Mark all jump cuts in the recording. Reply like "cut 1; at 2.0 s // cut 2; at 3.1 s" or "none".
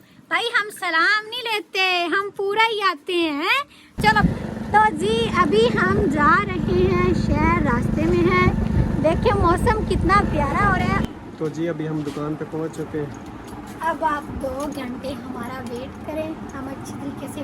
cut 1; at 3.9 s // cut 2; at 11.0 s

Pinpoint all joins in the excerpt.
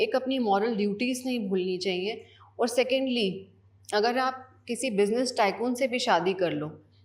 none

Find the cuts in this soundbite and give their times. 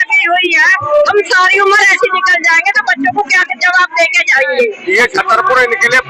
cut 1; at 4.8 s

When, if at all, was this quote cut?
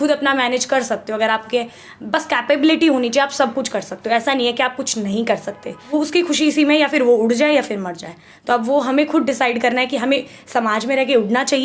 cut 1; at 5.9 s

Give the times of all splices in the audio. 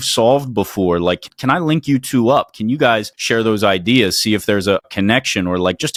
none

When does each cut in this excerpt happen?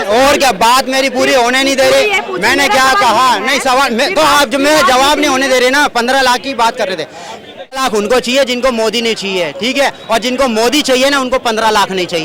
none

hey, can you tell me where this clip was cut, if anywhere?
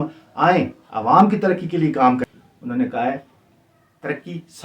cut 1; at 2.3 s

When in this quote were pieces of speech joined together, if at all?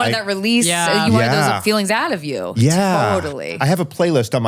cut 1; at 3.5 s

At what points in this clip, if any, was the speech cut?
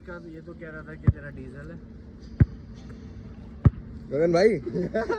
none

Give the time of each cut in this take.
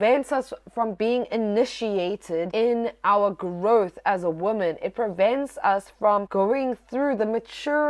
cut 1; at 2.5 s // cut 2; at 6.3 s

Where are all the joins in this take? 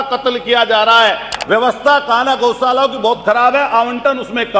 cut 1; at 1.3 s

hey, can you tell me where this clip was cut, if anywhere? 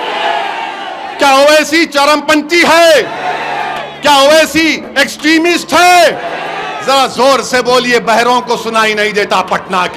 none

